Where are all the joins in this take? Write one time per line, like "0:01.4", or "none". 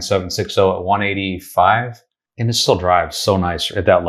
none